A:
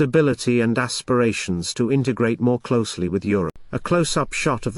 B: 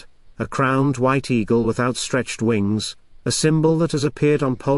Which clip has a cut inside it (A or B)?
A